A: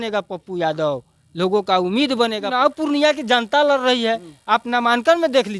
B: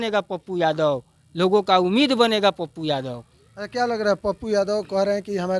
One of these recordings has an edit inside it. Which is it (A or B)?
A